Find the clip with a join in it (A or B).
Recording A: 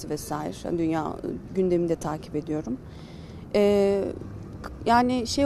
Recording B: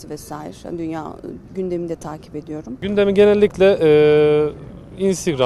B